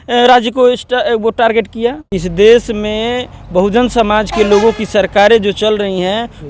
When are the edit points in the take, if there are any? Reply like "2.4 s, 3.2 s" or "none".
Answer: 2.1 s